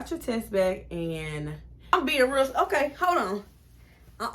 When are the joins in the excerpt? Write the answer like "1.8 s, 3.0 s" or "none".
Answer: 1.9 s